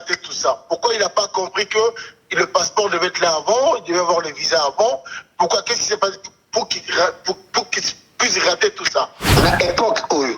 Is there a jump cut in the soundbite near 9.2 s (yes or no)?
yes